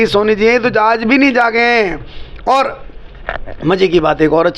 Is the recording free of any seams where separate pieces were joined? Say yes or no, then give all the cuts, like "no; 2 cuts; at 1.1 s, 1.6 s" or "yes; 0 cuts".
yes; 0 cuts